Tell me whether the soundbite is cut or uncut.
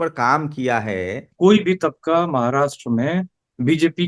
cut